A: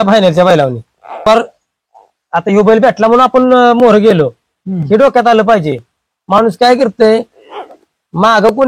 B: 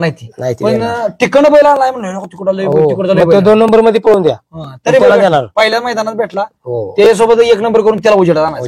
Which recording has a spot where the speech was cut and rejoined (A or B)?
A